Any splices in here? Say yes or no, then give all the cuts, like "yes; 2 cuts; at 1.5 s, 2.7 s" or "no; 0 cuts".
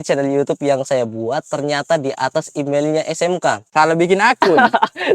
no; 0 cuts